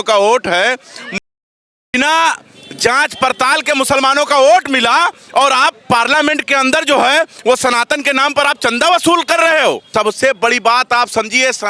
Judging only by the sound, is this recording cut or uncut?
cut